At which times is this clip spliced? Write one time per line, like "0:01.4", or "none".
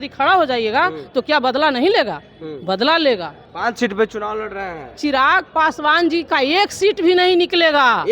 0:03.4